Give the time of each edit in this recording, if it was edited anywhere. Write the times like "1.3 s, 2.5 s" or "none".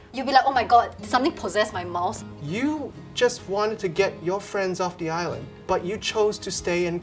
2.2 s, 5.5 s